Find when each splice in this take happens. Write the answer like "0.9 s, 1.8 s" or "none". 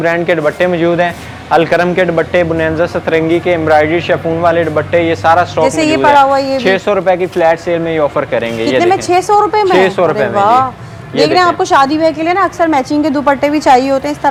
none

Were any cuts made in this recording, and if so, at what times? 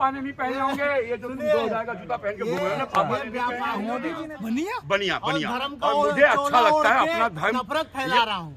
4.1 s

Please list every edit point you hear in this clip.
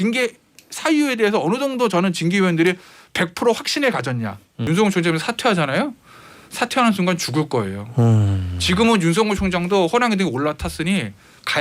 4.6 s

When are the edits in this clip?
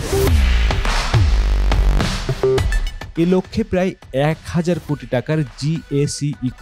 3.0 s

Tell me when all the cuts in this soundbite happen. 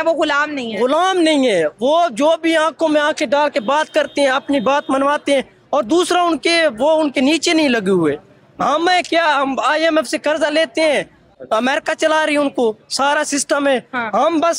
11.3 s

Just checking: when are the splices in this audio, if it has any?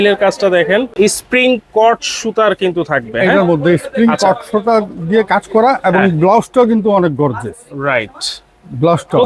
0.9 s

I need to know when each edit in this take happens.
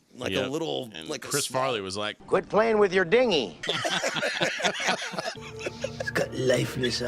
3.6 s, 5.4 s

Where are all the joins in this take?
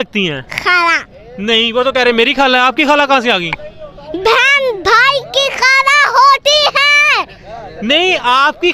none

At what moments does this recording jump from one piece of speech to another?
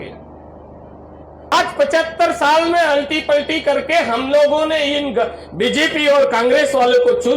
1.5 s

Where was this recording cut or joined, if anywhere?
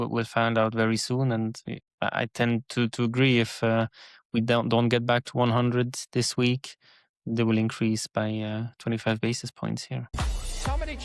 10.1 s

